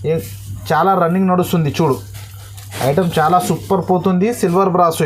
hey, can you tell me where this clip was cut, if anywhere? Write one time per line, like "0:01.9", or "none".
none